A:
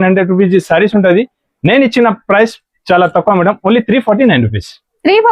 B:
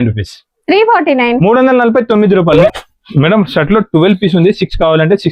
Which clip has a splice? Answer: B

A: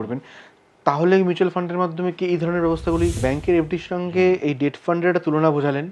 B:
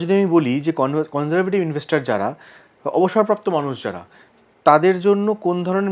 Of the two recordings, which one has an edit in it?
A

